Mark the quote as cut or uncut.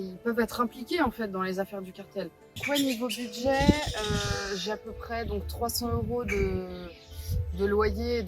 cut